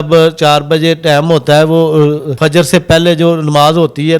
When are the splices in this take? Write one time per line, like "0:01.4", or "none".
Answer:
0:02.3